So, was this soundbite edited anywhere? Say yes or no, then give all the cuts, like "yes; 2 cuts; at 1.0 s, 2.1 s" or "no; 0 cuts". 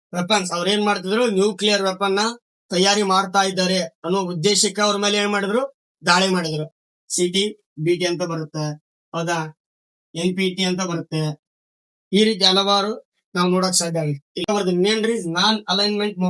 yes; 2 cuts; at 6.7 s, 14.4 s